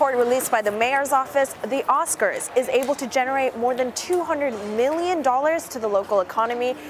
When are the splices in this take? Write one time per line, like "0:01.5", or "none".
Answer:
none